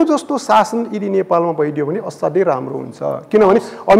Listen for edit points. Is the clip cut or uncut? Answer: uncut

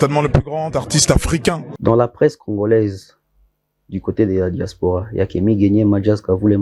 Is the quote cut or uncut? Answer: cut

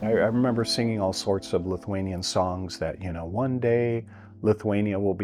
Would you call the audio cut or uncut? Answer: uncut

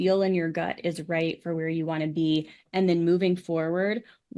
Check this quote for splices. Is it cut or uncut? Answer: uncut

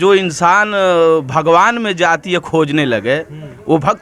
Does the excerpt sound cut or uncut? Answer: uncut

